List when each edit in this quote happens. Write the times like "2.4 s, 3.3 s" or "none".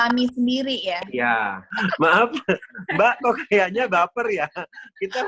1.7 s